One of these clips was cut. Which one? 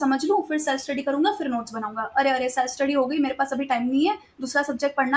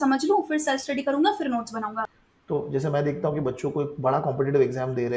second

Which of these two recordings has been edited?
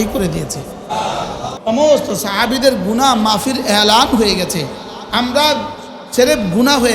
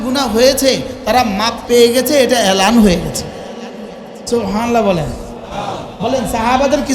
first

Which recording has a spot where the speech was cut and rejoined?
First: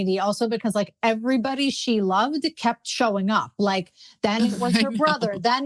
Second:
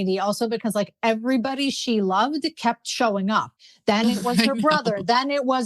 second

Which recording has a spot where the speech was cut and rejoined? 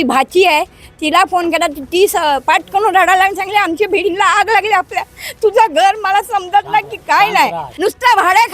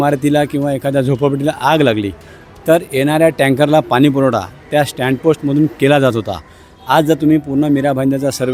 first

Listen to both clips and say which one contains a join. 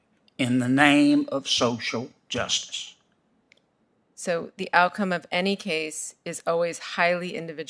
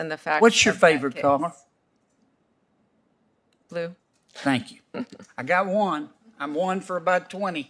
first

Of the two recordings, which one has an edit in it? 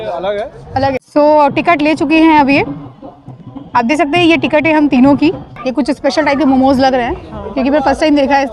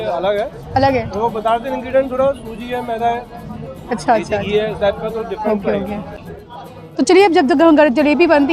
first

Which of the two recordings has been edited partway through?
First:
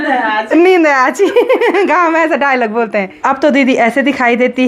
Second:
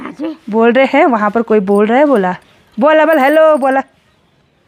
first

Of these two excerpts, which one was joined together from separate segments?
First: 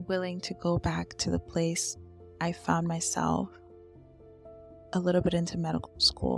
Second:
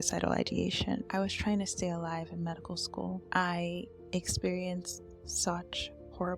second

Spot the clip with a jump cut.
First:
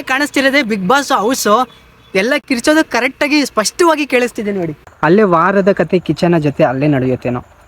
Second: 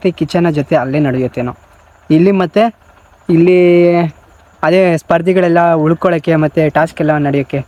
first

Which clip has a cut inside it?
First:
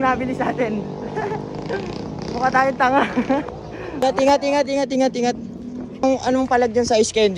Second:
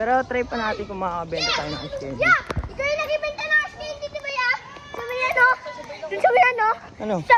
first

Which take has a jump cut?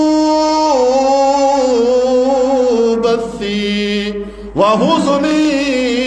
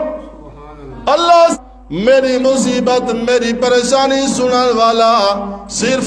second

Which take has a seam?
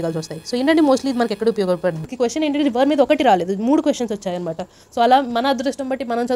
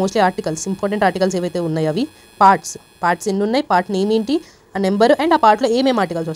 first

